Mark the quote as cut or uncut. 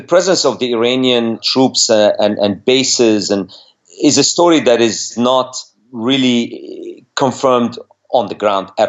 cut